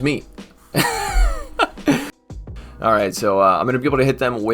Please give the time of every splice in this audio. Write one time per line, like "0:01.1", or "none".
0:02.2

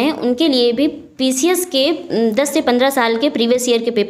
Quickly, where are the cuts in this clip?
none

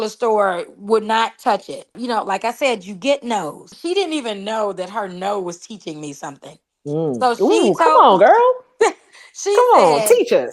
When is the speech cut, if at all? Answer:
0:02.0
0:03.7

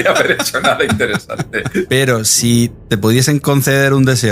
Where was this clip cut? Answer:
0:01.9
0:02.8

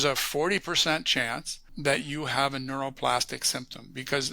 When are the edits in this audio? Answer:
0:01.7

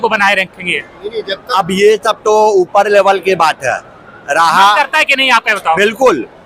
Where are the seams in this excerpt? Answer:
none

